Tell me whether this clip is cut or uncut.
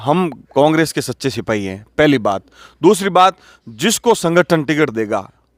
uncut